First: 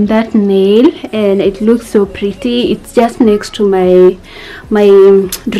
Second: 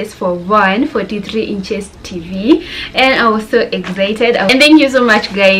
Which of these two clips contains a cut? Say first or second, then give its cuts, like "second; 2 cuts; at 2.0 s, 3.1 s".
second; 1 cut; at 4.5 s